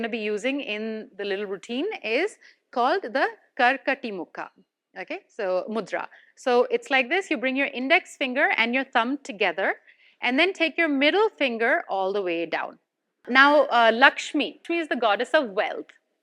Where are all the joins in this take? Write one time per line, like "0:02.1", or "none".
0:13.2
0:14.6

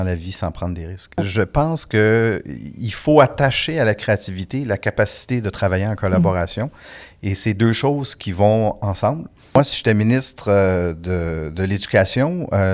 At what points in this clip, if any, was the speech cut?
0:01.2
0:09.6

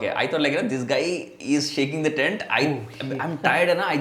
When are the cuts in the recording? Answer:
none

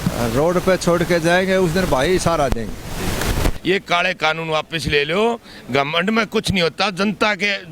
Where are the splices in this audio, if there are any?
0:03.6

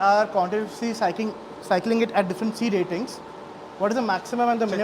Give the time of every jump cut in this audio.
none

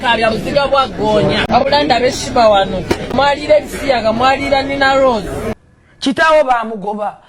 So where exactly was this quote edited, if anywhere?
0:01.5
0:03.1
0:05.5

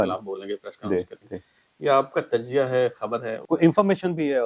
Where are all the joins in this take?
0:03.3

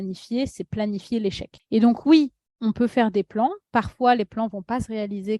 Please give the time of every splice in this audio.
0:01.5

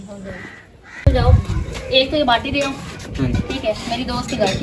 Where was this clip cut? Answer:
0:01.1

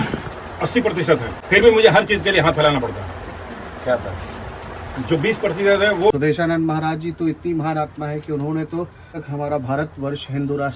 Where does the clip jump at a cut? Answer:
0:01.3
0:06.1
0:09.2

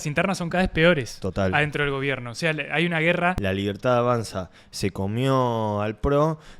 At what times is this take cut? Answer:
0:03.4

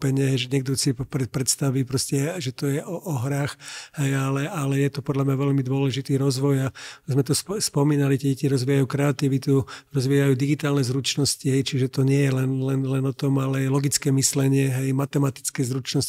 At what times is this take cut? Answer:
none

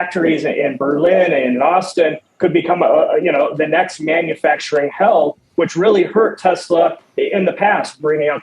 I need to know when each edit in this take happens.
none

